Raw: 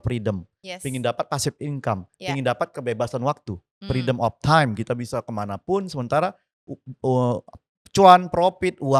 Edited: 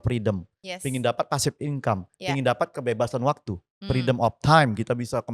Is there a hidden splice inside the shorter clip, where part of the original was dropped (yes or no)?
no